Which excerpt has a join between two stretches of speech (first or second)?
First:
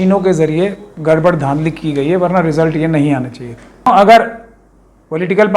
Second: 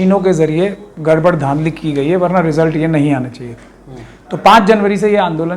first